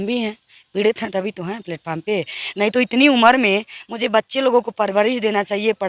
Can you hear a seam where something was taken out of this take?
no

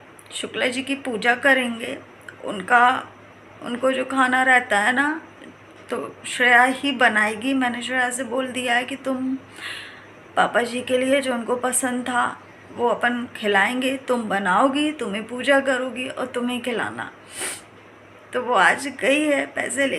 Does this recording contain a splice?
no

